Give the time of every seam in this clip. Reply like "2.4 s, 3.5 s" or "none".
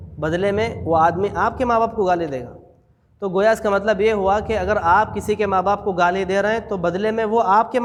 none